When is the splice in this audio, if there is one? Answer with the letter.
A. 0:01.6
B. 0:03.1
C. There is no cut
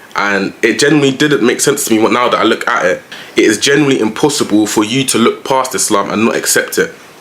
B